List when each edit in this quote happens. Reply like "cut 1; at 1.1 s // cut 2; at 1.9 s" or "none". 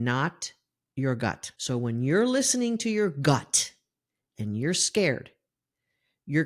cut 1; at 1.5 s